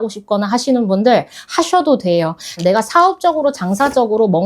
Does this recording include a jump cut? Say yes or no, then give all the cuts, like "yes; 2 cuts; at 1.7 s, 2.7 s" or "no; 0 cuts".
yes; 1 cut; at 2.6 s